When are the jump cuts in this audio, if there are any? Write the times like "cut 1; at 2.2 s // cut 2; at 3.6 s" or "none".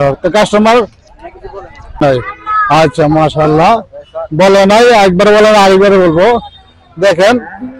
cut 1; at 2.0 s